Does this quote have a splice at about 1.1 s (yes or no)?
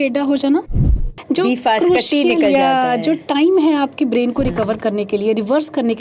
yes